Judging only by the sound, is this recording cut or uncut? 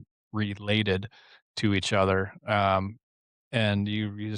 uncut